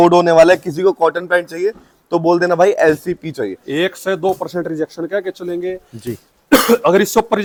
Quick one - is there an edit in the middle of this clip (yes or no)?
no